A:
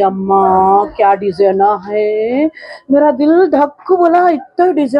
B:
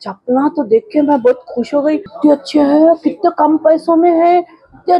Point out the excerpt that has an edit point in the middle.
B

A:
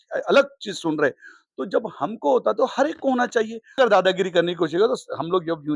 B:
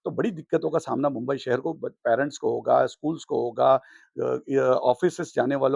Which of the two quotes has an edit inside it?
A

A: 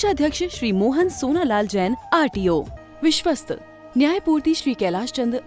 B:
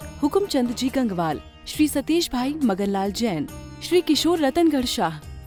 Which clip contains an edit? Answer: A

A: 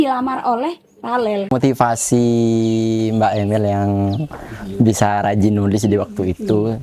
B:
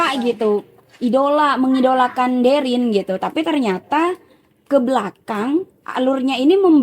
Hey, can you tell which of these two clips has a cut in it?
A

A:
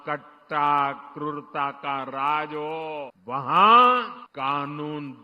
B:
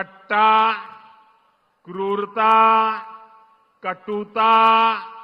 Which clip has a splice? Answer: A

